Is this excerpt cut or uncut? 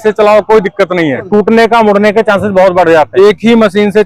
cut